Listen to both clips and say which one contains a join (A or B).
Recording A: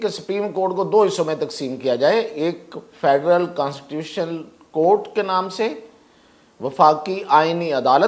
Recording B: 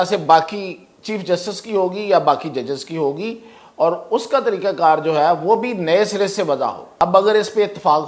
B